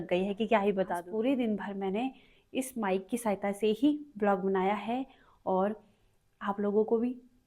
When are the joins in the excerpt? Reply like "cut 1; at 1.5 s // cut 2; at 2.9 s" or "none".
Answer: cut 1; at 1.0 s